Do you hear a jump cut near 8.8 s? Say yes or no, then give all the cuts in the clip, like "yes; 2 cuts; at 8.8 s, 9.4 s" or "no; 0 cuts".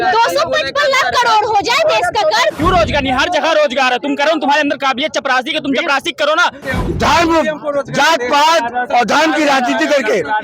no; 2 cuts; at 2.5 s, 6.7 s